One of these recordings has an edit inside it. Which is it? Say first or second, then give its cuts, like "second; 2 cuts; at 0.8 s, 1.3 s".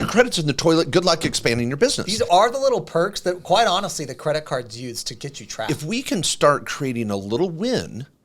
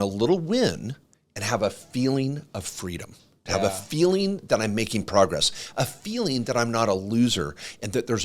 first; 2 cuts; at 2.0 s, 5.6 s